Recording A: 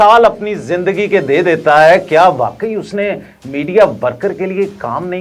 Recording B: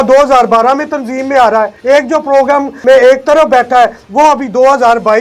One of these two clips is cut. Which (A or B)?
B